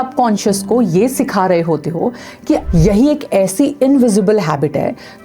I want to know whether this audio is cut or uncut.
cut